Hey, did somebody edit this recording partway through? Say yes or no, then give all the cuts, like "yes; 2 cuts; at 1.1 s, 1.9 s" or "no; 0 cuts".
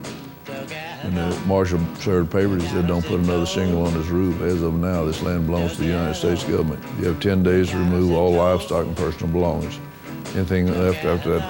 no; 0 cuts